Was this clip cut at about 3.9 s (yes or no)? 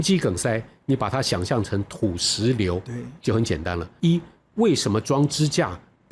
yes